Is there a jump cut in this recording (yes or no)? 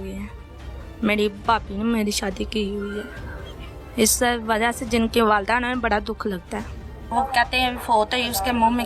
yes